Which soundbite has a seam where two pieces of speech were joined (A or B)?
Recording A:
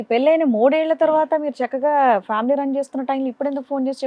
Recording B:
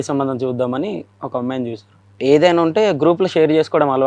B